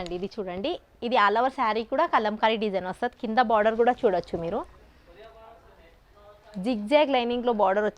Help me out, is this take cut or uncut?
uncut